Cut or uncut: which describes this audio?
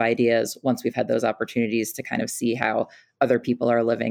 uncut